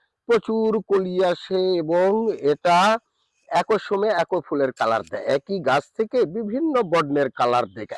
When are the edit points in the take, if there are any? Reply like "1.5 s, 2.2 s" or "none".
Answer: none